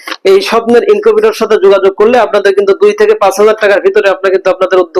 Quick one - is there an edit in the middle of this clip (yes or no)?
no